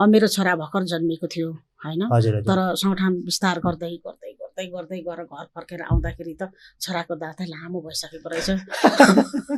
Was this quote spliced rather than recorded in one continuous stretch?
no; 0 cuts

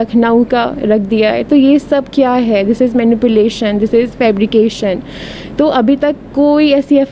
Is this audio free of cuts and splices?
yes; 0 cuts

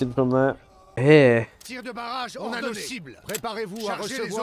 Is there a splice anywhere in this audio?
yes; 1 cut; at 0.9 s

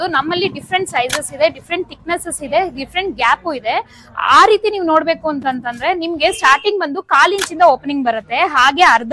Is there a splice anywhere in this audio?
no; 0 cuts

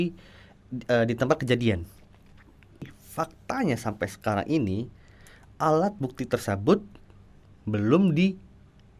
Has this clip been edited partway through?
yes; 1 cut; at 3.0 s

